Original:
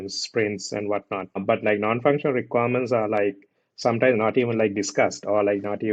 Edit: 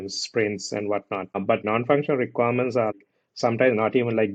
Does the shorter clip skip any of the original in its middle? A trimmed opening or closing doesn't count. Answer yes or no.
yes